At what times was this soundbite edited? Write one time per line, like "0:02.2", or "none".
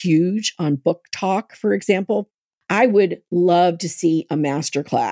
0:02.2